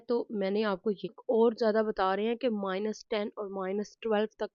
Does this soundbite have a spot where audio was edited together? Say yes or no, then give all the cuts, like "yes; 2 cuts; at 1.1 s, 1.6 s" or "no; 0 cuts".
yes; 1 cut; at 1.1 s